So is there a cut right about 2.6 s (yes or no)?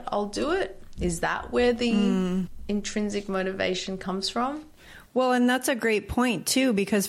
yes